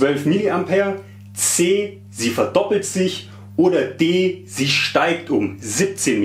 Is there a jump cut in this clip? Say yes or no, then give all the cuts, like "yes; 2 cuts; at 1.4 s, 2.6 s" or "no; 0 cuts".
no; 0 cuts